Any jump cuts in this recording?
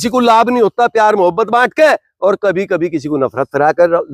no; 0 cuts

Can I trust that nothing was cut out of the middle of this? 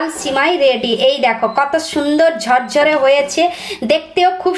yes; 0 cuts

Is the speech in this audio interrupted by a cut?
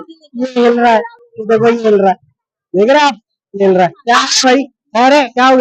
yes; 1 cut; at 4.0 s

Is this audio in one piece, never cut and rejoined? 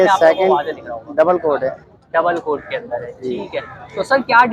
yes; 0 cuts

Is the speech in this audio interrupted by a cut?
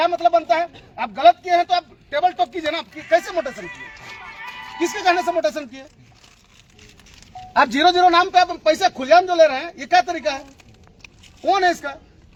no; 0 cuts

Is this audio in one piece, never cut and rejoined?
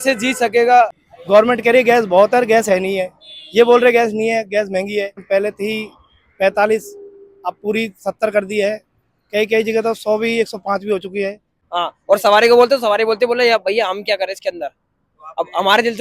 no; 3 cuts; at 1.0 s, 5.2 s, 11.5 s

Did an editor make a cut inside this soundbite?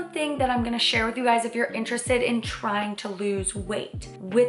no; 0 cuts

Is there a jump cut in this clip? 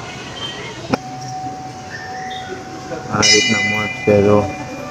yes; 1 cut; at 0.9 s

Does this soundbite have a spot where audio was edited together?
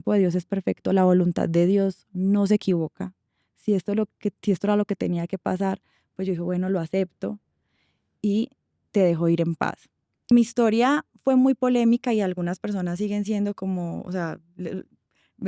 yes; 1 cut; at 10.3 s

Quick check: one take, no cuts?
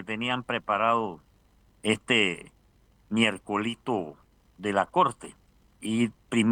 yes; 0 cuts

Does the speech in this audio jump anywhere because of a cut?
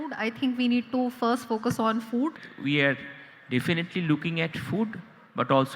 yes; 1 cut; at 2.5 s

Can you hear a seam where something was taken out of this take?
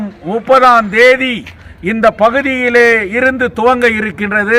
no; 0 cuts

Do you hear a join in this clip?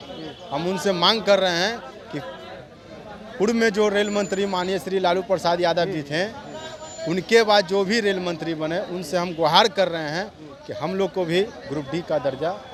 no; 0 cuts

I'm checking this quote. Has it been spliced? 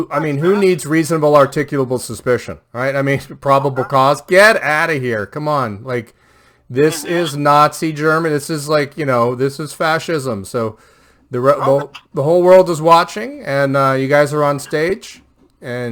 no; 0 cuts

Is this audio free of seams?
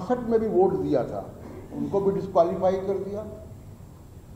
yes; 0 cuts

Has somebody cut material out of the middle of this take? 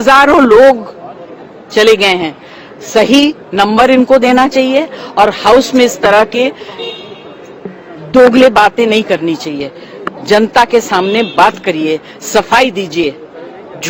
no; 0 cuts

